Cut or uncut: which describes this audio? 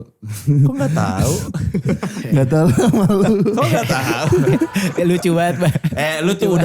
uncut